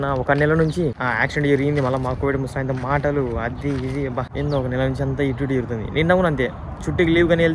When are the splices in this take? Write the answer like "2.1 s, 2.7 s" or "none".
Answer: 1.0 s, 4.3 s